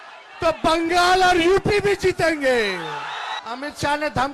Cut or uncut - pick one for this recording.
cut